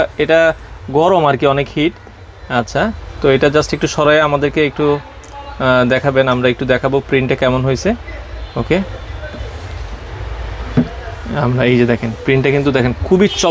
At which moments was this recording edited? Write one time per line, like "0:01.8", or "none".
none